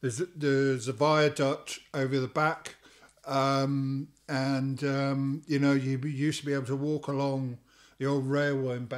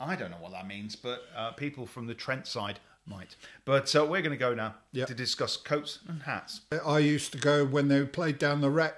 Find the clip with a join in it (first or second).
second